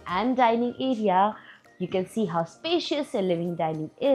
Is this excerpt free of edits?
yes; 0 cuts

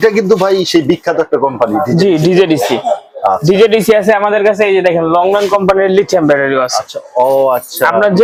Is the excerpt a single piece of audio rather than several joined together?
yes; 0 cuts

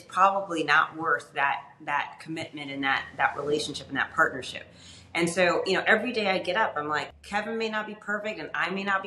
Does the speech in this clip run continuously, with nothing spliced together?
no; 1 cut; at 7.1 s

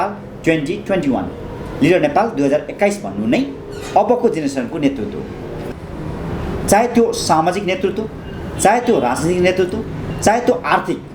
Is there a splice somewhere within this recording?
yes; 1 cut; at 5.5 s

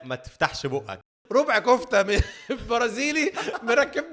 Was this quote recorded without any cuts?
no; 1 cut; at 1.1 s

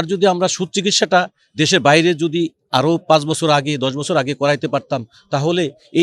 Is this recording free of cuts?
yes; 0 cuts

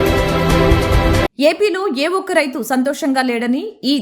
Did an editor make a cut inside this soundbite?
yes; 1 cut; at 1.3 s

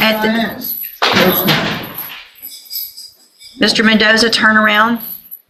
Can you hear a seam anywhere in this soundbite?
no; 0 cuts

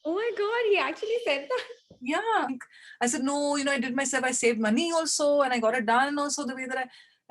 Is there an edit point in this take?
yes; 1 cut; at 2.5 s

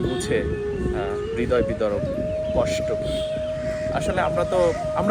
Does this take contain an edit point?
no; 0 cuts

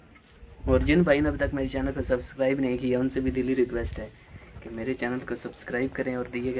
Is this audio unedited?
yes; 0 cuts

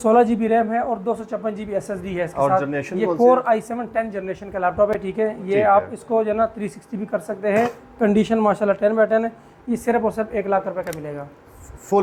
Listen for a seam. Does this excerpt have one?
no; 0 cuts

